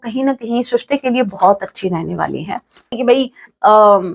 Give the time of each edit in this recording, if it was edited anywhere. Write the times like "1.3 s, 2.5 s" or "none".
3.0 s